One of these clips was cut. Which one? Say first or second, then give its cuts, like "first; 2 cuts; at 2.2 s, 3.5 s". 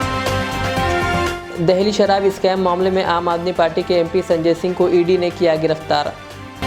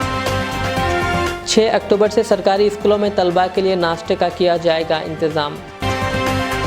first; 1 cut; at 1.3 s